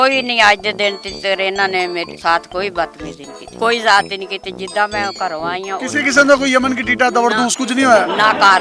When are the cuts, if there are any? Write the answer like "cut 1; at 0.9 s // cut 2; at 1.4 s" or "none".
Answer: none

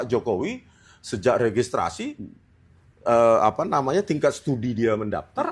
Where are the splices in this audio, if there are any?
none

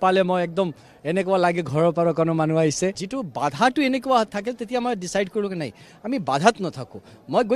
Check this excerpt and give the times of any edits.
cut 1; at 3.1 s

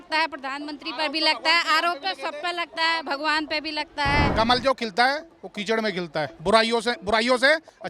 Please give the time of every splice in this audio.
cut 1; at 4.3 s // cut 2; at 6.3 s

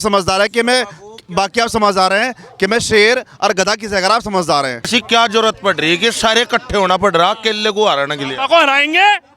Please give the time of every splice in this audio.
cut 1; at 4.9 s

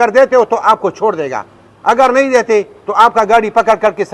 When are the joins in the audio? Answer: none

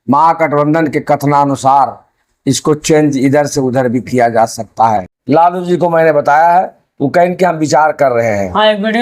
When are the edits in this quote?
cut 1; at 5.1 s

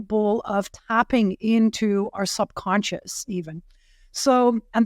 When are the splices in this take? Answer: none

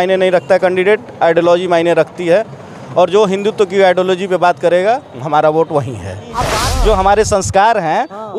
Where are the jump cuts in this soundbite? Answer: cut 1; at 6.6 s

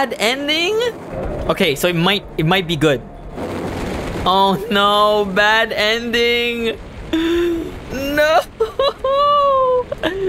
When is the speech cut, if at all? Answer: cut 1; at 1.1 s // cut 2; at 3.4 s // cut 3; at 7.8 s

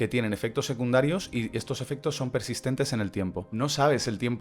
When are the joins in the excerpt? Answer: cut 1; at 3.5 s

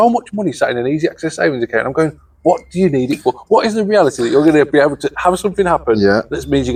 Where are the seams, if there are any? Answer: none

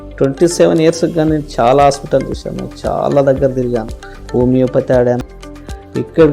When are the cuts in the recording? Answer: cut 1; at 5.2 s

